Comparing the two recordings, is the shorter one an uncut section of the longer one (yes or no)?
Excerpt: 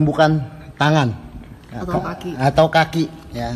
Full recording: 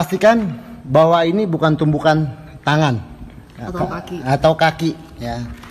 yes